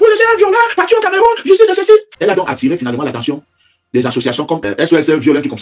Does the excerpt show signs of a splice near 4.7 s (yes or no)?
yes